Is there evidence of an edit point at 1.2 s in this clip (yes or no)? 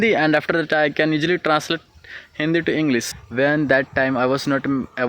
no